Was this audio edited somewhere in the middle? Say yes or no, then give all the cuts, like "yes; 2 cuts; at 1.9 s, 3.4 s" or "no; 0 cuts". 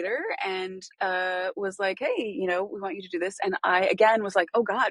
no; 0 cuts